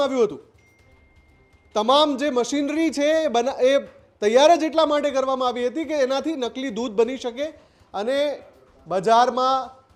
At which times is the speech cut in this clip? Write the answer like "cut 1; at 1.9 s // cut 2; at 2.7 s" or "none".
none